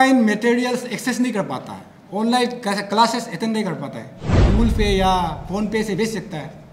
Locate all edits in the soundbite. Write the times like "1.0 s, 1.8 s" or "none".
4.4 s